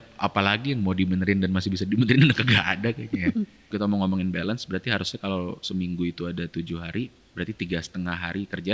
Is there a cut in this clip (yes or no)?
yes